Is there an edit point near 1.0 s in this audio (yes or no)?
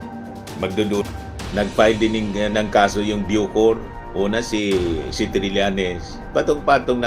yes